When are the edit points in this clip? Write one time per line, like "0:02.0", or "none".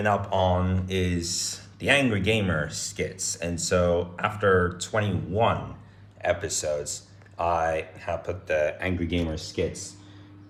none

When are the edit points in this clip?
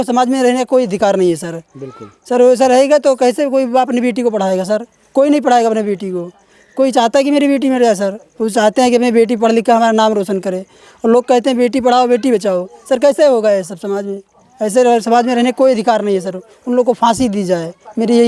none

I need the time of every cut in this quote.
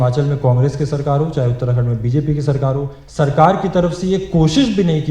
0:03.0

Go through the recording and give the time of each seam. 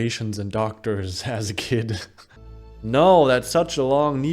0:02.7

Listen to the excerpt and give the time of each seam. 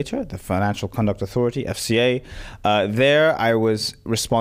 none

